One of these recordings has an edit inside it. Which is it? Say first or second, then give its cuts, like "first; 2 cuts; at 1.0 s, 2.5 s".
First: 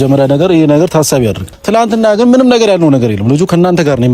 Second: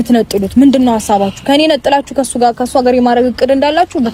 first; 1 cut; at 1.5 s